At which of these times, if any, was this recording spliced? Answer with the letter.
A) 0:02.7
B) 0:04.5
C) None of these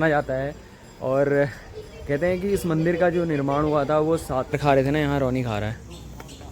B